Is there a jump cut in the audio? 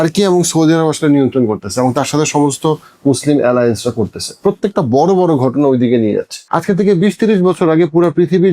yes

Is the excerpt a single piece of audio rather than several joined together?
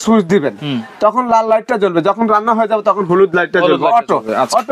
yes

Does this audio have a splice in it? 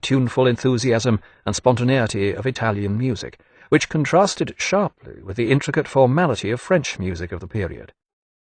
yes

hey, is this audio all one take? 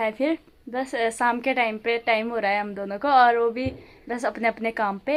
yes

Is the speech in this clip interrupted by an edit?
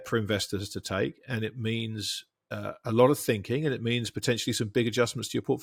no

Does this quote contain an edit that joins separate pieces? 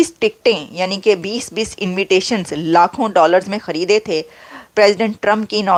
no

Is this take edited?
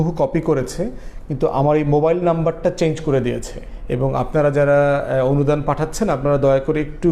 no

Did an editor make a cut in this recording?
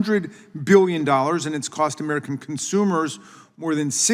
no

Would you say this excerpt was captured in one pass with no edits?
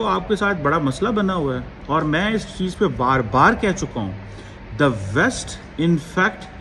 yes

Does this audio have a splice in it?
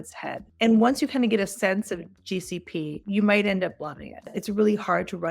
yes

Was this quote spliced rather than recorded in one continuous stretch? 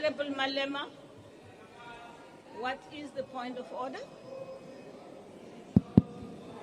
yes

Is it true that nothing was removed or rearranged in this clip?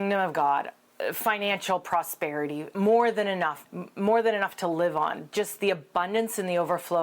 no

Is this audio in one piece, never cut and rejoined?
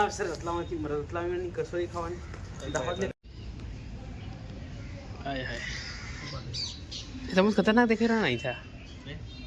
no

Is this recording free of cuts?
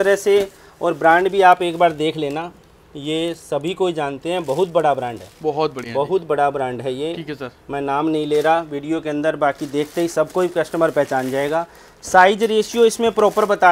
yes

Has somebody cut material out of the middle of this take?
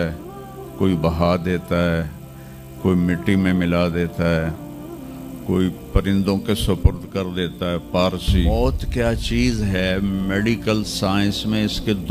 yes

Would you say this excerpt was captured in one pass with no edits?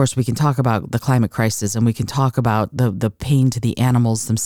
yes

